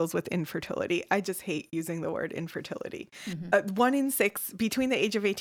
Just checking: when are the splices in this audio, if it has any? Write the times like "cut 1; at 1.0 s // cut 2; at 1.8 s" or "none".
cut 1; at 3.3 s